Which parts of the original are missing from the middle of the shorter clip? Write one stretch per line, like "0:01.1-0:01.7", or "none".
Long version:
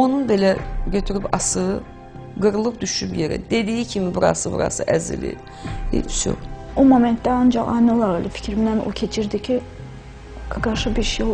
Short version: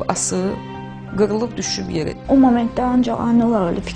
0:03.4-0:06.6